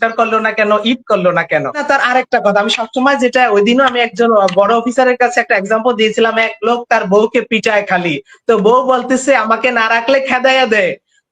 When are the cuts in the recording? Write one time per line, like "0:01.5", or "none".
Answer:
0:01.8